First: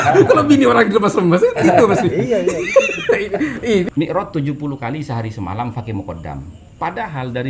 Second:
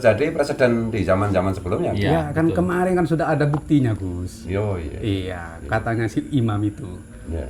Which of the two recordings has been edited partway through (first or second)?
first